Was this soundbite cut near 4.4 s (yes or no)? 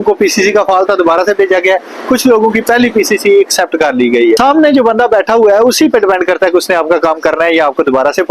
yes